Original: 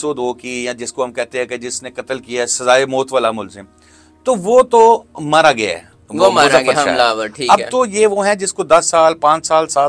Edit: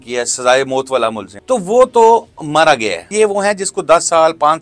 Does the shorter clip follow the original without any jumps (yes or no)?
no